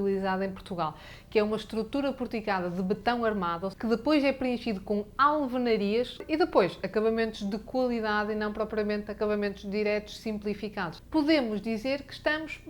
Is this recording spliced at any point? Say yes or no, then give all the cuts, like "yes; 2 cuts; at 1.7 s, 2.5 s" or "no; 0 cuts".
yes; 2 cuts; at 3.7 s, 11.0 s